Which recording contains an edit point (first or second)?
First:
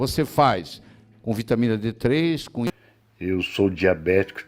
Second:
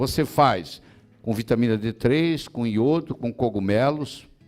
first